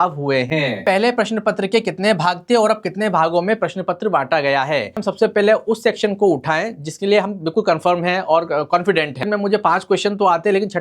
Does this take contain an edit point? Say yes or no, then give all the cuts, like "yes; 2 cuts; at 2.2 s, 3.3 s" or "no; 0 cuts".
yes; 3 cuts; at 0.8 s, 5.0 s, 9.3 s